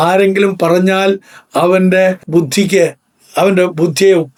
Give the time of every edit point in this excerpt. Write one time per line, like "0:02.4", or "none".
none

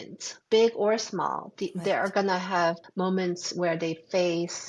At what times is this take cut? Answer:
0:02.8

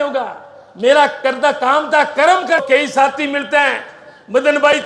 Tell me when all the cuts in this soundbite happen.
0:02.6

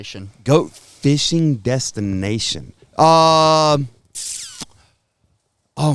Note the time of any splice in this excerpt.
none

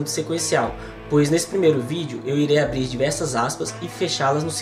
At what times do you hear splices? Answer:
0:03.2

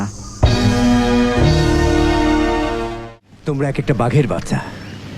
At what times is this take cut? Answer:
0:02.9

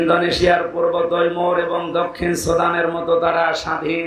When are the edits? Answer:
none

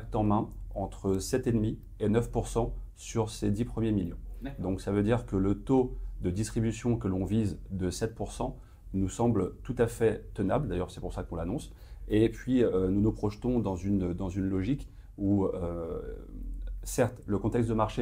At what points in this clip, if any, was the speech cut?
none

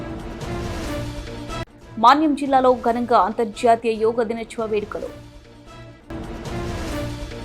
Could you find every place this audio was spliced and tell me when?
0:01.5

